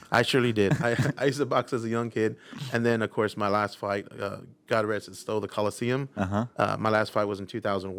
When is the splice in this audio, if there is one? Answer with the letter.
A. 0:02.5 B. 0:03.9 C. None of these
C